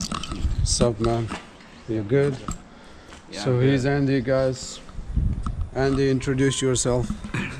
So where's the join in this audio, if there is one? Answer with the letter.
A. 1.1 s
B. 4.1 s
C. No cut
C